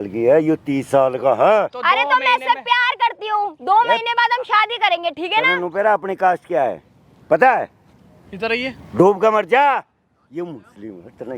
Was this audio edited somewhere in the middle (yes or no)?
no